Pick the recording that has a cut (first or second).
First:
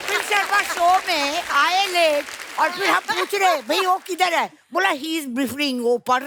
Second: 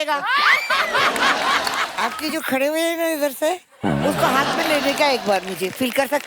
second